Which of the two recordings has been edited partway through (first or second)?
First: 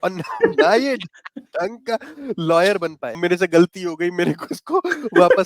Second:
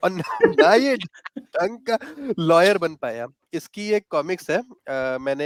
first